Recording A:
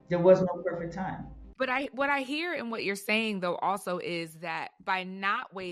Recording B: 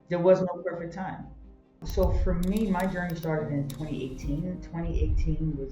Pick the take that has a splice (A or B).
B